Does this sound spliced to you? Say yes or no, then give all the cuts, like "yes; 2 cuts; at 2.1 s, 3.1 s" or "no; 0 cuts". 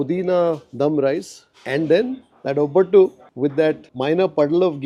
no; 0 cuts